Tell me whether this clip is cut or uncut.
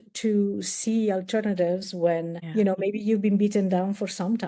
cut